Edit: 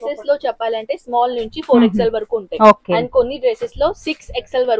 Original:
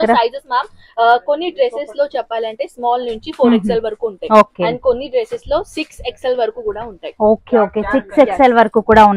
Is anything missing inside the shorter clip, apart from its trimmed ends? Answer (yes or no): no